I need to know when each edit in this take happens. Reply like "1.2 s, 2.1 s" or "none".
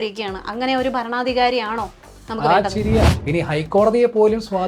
3.1 s